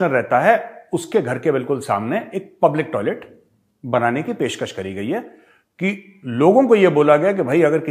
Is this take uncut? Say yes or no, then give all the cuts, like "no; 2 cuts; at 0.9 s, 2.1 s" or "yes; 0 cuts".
yes; 0 cuts